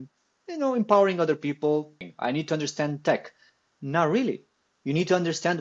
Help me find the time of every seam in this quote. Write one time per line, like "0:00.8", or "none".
0:02.0